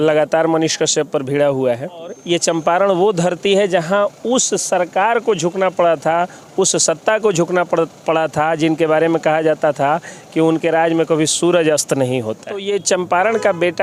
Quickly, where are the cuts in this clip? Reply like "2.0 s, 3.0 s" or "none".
2.2 s, 12.6 s